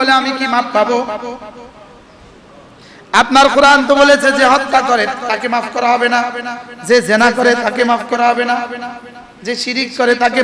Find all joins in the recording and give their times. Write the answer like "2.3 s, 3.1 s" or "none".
none